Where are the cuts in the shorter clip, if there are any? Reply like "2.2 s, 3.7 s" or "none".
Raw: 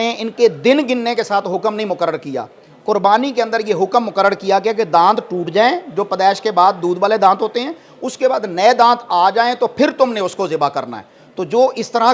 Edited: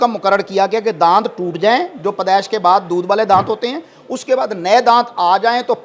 none